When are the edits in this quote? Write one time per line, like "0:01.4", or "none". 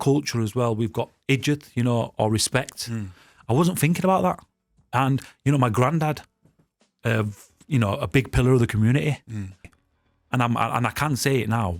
0:09.7